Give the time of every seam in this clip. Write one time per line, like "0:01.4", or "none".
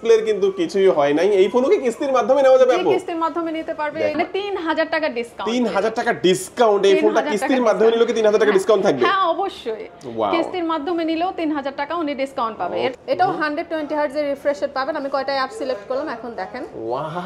0:04.2
0:12.8